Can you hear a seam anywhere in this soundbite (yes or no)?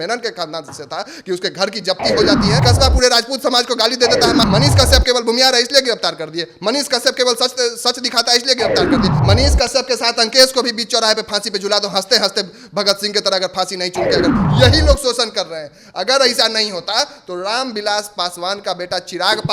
yes